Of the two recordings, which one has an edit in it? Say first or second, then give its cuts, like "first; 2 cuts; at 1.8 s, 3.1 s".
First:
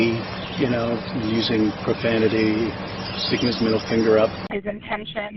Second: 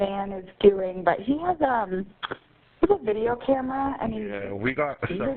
first; 1 cut; at 4.5 s